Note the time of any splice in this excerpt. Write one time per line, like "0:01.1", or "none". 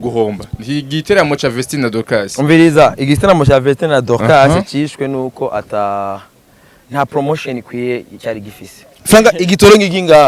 0:09.0